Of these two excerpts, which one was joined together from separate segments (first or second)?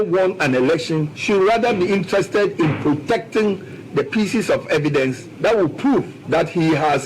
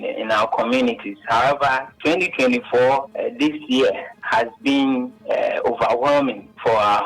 first